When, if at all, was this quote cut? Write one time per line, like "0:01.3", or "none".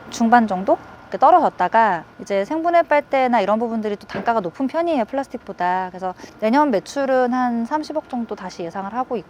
0:06.2